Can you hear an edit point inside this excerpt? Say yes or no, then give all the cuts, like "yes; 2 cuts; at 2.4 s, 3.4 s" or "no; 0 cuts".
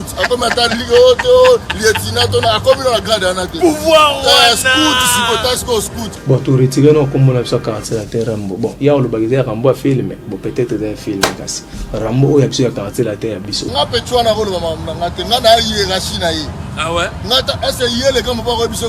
yes; 1 cut; at 6.1 s